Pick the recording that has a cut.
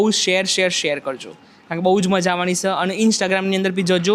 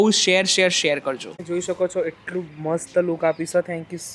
second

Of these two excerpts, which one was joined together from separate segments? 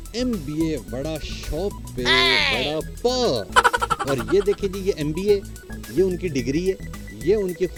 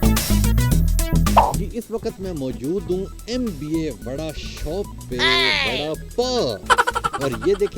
second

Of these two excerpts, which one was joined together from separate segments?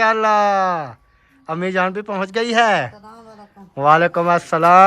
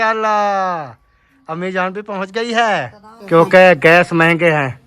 second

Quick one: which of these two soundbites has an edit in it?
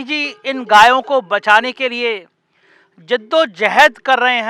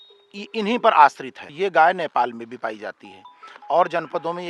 second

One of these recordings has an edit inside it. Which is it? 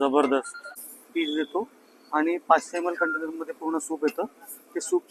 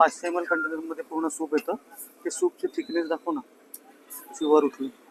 first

